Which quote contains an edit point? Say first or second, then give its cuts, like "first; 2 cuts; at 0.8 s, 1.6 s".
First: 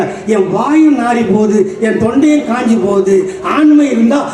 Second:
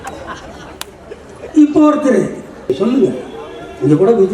second; 1 cut; at 2.5 s